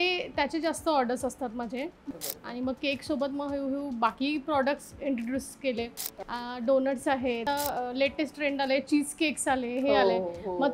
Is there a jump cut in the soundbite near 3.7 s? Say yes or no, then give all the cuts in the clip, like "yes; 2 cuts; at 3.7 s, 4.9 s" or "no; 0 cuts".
no; 3 cuts; at 2.1 s, 6.2 s, 7.4 s